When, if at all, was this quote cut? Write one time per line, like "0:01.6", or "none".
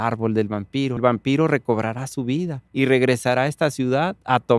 0:01.0
0:02.6